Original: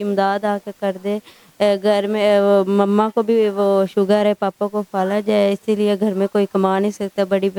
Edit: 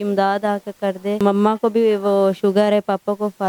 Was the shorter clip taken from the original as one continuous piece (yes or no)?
no